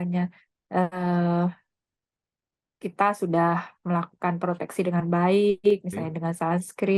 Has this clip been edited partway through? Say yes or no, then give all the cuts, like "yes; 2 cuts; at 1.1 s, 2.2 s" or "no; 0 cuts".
no; 0 cuts